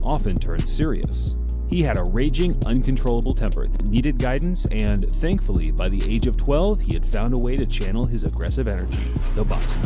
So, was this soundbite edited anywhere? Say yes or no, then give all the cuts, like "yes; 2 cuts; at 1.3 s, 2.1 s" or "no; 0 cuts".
no; 0 cuts